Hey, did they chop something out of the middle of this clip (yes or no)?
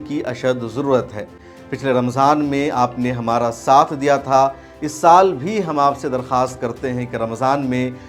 no